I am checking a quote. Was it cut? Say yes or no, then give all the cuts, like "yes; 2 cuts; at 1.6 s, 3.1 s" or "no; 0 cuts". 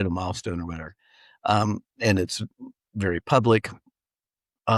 no; 0 cuts